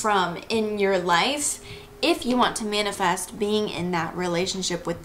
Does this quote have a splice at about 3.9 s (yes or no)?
no